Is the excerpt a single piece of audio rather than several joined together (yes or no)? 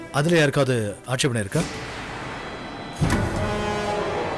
yes